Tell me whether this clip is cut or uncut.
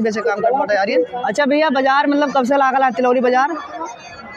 cut